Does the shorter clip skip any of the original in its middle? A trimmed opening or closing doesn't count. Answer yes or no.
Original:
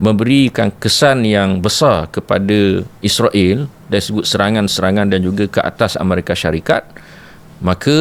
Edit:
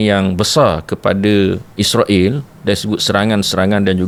no